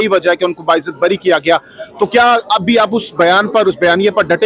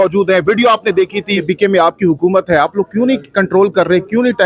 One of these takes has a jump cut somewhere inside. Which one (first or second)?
second